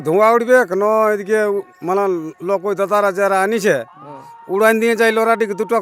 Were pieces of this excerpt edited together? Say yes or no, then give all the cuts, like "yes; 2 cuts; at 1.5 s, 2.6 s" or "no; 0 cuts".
no; 0 cuts